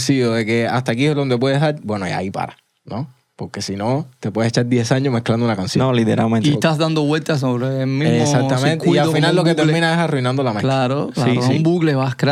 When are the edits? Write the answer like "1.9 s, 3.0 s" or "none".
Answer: none